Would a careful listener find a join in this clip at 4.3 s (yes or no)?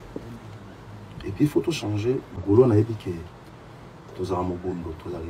no